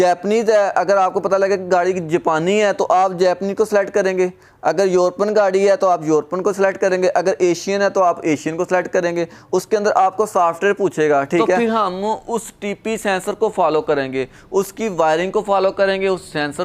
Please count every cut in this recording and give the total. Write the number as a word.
one